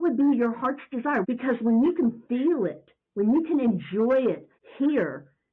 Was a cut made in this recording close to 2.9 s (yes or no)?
no